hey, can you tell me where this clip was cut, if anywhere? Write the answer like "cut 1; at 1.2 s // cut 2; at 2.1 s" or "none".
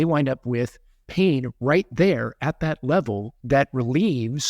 cut 1; at 3.3 s